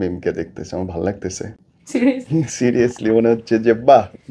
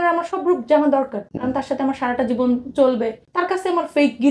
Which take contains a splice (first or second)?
second